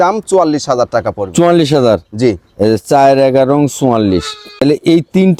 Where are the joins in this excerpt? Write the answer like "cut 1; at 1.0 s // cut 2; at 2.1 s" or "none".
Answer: cut 1; at 4.5 s